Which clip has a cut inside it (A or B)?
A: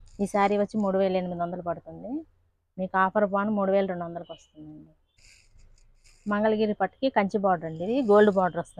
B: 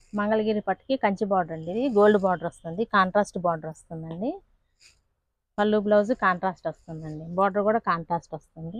A